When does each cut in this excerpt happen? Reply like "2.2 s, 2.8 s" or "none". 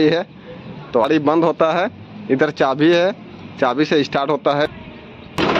1.0 s, 4.7 s